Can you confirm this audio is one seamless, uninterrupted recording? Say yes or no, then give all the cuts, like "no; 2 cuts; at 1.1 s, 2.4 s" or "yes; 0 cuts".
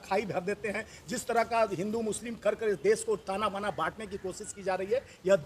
yes; 0 cuts